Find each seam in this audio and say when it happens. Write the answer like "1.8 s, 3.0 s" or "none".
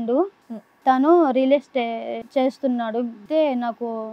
2.2 s, 3.2 s